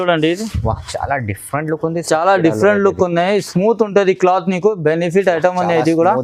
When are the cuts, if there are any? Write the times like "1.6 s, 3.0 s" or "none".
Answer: none